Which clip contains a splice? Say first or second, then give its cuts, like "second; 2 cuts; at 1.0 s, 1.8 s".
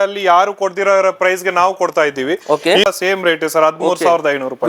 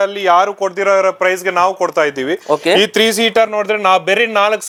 first; 1 cut; at 2.8 s